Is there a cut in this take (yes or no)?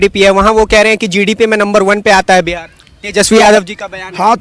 no